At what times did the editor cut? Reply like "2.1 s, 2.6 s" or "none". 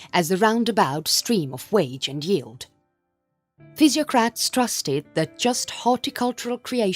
none